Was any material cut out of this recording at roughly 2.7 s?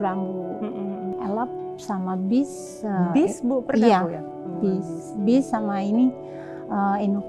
no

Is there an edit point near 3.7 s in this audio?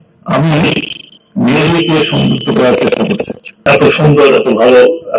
yes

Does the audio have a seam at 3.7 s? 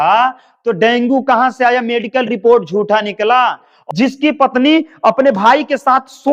yes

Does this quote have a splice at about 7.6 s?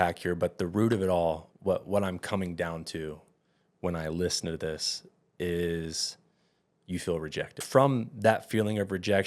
yes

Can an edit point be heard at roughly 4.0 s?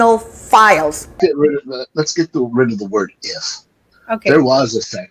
no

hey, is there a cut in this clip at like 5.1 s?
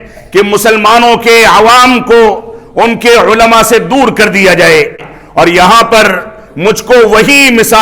yes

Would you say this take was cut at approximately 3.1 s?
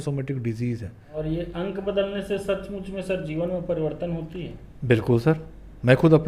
no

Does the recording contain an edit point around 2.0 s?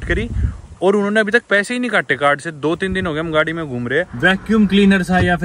no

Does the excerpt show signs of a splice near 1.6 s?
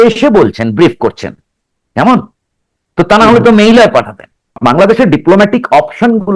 no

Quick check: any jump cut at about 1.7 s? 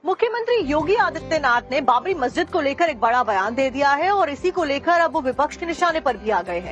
yes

